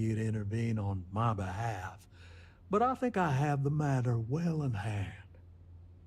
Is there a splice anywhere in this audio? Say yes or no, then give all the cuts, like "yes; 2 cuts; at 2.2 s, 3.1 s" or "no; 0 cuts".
no; 0 cuts